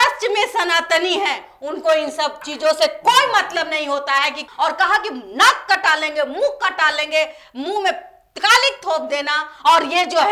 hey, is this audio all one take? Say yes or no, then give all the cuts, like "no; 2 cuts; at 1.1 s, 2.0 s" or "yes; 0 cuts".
no; 1 cut; at 4.4 s